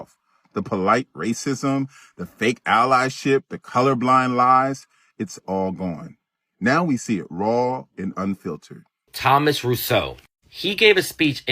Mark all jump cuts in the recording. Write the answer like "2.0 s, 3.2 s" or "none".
9.1 s